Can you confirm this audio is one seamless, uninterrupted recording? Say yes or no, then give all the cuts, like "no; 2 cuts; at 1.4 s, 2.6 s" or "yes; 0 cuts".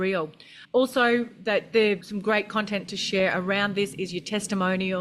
no; 1 cut; at 2.1 s